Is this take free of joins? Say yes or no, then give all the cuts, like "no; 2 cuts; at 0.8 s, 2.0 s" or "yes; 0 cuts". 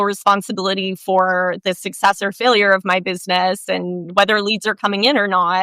yes; 0 cuts